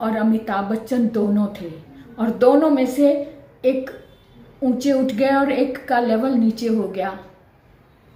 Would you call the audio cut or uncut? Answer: uncut